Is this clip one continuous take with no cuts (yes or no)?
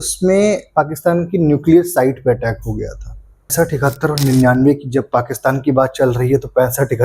no